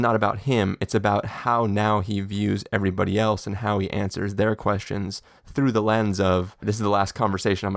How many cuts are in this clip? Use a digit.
1